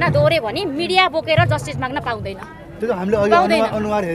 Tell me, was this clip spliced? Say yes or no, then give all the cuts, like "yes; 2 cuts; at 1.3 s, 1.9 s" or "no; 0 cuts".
no; 0 cuts